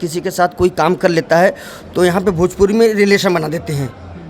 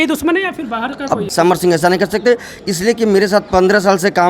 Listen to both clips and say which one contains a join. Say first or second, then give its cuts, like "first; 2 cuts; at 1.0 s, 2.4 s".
second; 1 cut; at 1.3 s